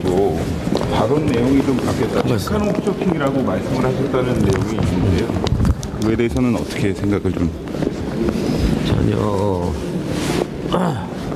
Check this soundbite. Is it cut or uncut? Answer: uncut